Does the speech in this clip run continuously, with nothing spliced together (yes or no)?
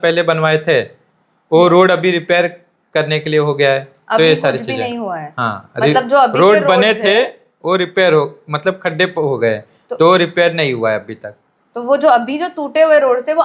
yes